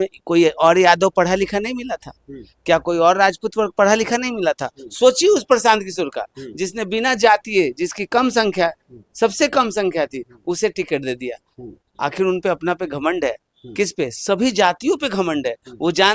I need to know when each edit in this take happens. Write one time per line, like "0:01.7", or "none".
none